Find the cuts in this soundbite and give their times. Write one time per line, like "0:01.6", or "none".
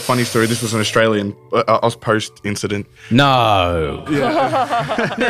none